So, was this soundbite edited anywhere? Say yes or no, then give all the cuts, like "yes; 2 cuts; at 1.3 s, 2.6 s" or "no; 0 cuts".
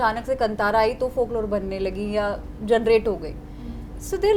no; 0 cuts